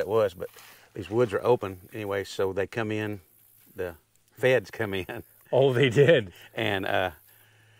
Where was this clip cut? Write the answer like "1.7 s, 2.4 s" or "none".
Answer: none